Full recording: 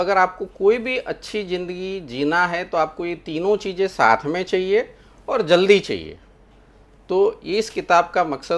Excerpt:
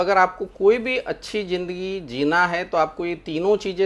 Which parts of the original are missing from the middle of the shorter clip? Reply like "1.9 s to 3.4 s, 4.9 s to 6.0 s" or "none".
none

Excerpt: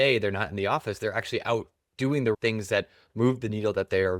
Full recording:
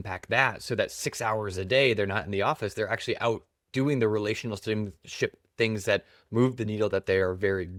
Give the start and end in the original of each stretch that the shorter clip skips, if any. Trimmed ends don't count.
4.1 s to 5.5 s

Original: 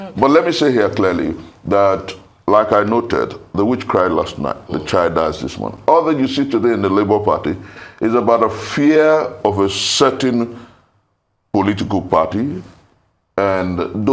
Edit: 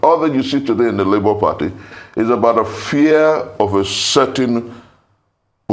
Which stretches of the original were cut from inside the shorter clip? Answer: none

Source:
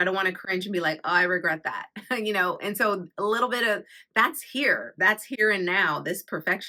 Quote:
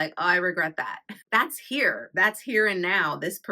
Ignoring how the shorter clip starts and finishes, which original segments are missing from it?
2.0 s to 3.9 s

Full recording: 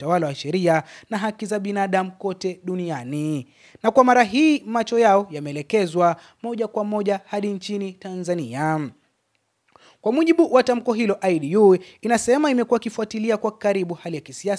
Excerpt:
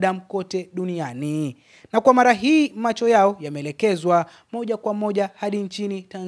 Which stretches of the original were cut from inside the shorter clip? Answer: none

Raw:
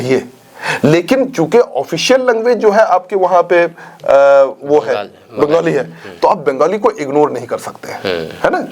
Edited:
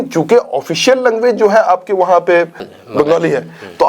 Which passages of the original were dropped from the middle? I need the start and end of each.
3.9 s to 5.1 s

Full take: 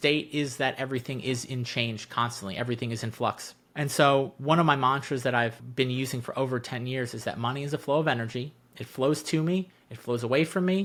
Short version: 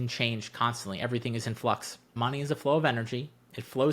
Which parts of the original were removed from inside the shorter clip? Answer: 3.7 s to 7.4 s

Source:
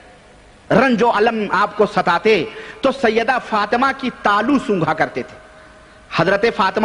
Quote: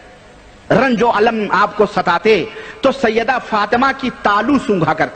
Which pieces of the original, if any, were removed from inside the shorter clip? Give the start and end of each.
none

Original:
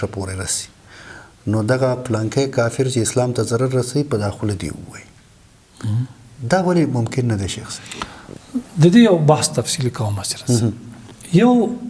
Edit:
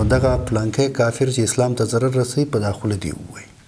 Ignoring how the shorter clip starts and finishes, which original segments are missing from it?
none

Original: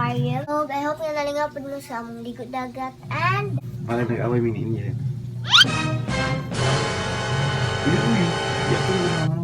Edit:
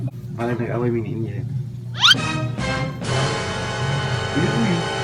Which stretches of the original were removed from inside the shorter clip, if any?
none

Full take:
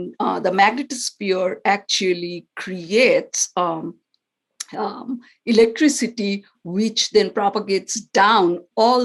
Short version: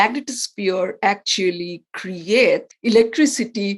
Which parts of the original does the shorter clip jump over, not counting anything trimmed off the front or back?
3.3 s to 5.3 s

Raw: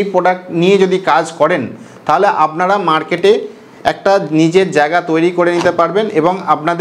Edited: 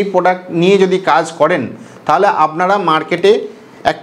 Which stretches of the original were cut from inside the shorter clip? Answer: none

